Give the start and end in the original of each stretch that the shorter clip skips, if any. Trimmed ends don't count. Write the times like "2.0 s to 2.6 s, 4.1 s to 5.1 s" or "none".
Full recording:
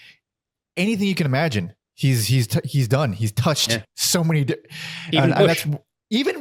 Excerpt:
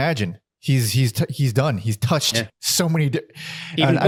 none